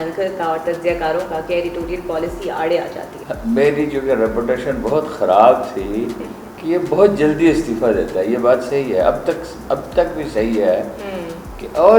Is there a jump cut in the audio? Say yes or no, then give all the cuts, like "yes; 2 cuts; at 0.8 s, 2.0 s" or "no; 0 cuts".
no; 0 cuts